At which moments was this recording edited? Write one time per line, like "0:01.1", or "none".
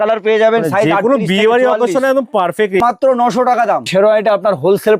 0:02.8
0:03.9